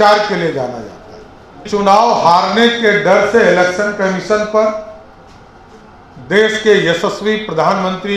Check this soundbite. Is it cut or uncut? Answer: cut